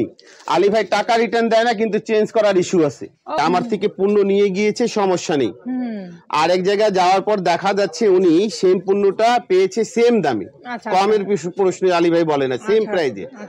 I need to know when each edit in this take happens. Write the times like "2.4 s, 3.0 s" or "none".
3.4 s